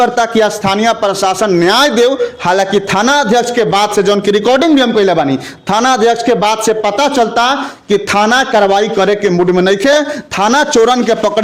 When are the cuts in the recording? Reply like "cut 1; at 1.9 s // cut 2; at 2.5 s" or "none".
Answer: none